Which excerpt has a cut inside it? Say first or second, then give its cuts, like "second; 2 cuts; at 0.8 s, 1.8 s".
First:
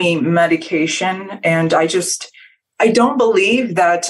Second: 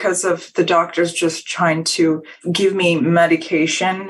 first; 1 cut; at 2.6 s